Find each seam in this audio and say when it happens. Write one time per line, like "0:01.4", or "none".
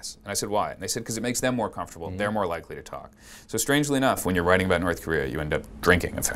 none